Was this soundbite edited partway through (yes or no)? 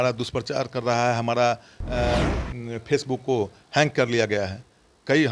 no